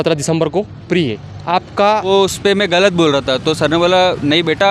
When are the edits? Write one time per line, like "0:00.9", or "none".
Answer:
0:02.1